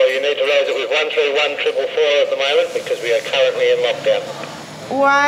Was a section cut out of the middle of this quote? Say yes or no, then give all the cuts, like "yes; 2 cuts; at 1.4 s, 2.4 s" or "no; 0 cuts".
no; 0 cuts